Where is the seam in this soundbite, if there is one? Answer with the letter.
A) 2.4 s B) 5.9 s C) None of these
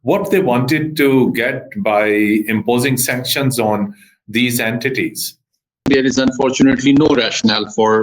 B